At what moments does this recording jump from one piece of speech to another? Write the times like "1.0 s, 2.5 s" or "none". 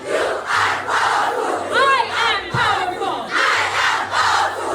none